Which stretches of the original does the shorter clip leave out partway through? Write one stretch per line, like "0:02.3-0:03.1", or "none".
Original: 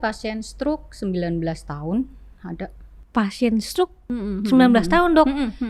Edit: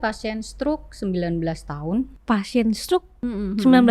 0:02.2-0:03.0